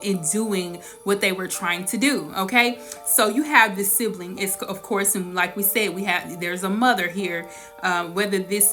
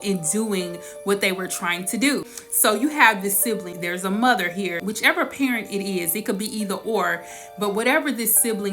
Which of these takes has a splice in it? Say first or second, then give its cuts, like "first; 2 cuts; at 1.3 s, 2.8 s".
second; 3 cuts; at 2.3 s, 3.7 s, 4.8 s